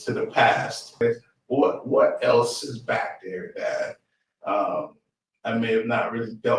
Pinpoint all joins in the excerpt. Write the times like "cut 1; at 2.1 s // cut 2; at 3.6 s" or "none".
cut 1; at 1.0 s

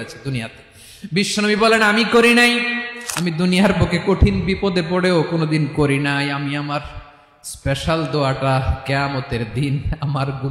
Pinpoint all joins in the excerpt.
cut 1; at 2.9 s

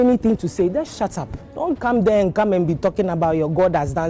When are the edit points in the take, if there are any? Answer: none

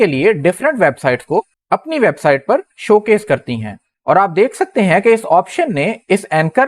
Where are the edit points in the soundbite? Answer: cut 1; at 3.8 s

